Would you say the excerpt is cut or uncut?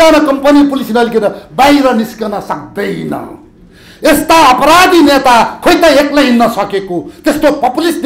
uncut